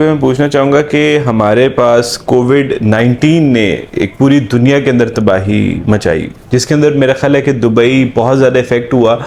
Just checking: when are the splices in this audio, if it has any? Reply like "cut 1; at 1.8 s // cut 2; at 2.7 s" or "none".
none